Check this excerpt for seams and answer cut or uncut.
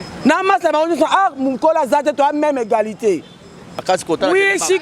cut